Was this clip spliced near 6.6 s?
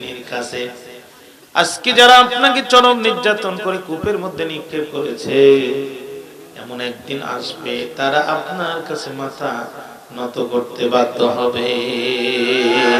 no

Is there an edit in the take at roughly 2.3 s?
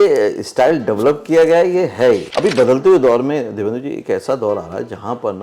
yes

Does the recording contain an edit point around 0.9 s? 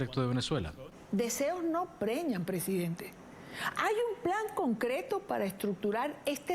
yes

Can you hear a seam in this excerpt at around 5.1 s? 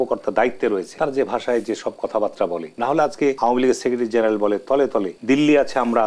yes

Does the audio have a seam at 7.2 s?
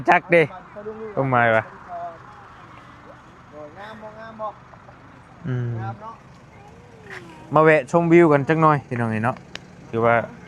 no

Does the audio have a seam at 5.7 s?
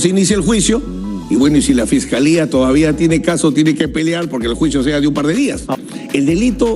yes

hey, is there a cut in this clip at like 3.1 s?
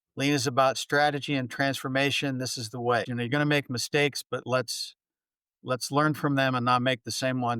yes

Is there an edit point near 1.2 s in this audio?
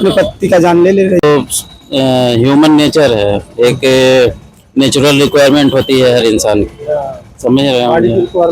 yes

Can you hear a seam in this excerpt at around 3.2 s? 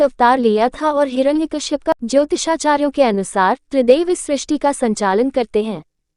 no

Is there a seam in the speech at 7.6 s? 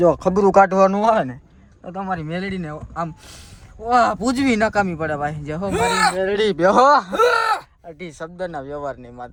no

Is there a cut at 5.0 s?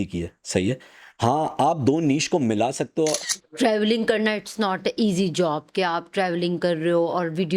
no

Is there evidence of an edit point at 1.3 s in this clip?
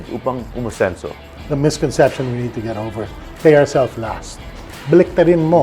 yes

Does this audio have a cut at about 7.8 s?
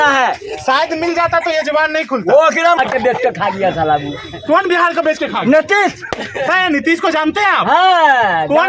no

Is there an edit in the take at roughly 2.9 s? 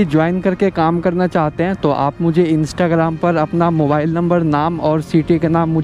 no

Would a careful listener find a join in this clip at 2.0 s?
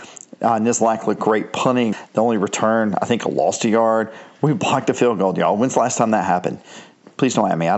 yes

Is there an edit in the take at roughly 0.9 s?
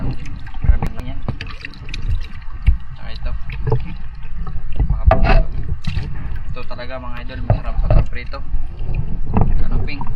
yes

